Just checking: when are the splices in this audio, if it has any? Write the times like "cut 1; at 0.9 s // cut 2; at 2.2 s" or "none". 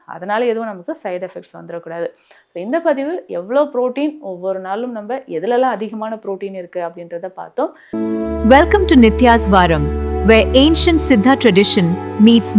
cut 1; at 7.8 s